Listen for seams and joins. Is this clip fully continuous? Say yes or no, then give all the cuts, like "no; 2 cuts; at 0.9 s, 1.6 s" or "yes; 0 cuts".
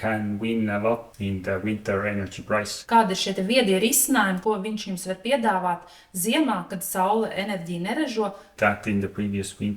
no; 3 cuts; at 1.1 s, 2.7 s, 8.5 s